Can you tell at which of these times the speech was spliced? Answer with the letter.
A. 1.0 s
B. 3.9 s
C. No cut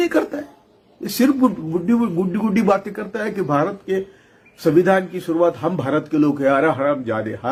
C